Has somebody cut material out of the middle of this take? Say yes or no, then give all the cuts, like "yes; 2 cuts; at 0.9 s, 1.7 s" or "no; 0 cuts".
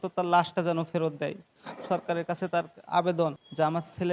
yes; 1 cut; at 1.5 s